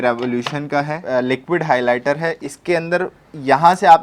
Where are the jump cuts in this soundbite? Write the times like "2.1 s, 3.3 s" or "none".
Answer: 1.0 s, 2.5 s